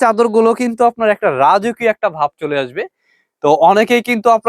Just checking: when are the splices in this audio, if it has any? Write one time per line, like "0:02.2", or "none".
none